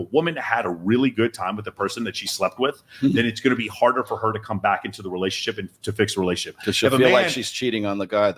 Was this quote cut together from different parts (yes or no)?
no